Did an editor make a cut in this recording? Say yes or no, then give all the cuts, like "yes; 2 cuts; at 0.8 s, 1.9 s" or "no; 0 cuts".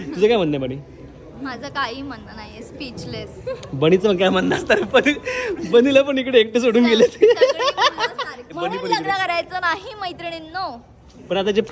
yes; 1 cut; at 8.5 s